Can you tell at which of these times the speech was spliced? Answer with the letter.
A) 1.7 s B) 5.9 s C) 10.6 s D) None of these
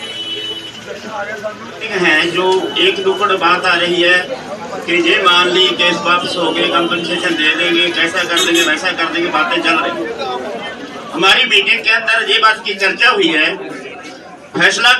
A